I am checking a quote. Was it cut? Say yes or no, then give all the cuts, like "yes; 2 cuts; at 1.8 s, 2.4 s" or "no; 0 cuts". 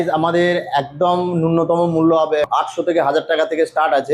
yes; 1 cut; at 2.4 s